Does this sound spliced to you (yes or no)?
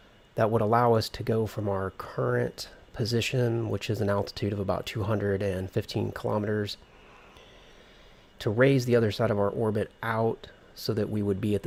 no